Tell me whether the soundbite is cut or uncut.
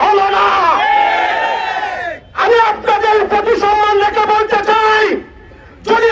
uncut